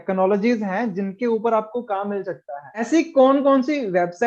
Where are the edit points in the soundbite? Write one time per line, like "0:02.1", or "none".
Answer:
0:02.8